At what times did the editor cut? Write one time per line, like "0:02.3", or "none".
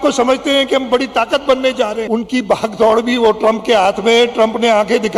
0:02.1